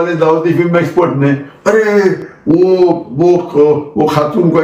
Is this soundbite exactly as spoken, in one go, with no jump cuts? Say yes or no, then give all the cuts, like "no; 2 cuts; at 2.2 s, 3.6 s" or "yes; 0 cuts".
yes; 0 cuts